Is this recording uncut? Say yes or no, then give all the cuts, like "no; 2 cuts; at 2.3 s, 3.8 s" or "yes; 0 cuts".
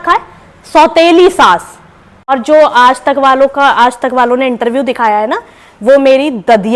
yes; 0 cuts